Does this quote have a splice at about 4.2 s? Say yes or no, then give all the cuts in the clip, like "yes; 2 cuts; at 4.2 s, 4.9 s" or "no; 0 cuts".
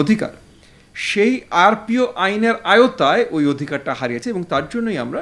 yes; 1 cut; at 4.2 s